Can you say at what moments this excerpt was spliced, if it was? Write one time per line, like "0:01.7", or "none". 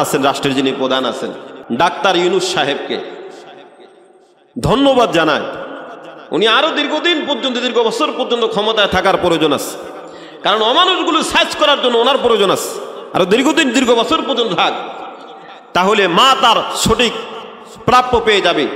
0:01.5